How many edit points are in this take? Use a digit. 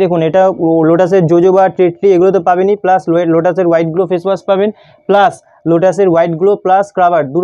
0